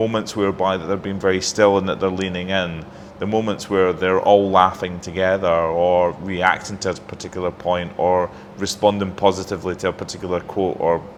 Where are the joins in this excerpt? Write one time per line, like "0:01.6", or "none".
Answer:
none